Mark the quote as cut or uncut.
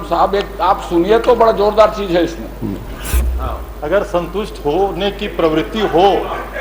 cut